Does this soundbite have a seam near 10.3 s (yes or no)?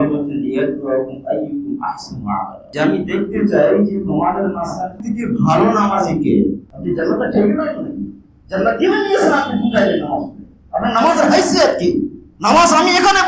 no